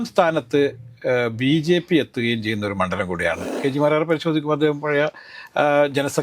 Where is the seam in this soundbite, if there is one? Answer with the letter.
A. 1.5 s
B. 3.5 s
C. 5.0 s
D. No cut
B